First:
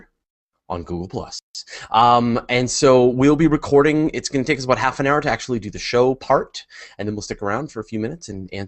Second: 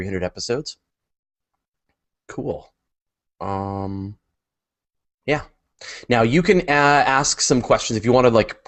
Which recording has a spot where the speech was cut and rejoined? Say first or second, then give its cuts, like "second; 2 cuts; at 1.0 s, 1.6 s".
first; 1 cut; at 4.6 s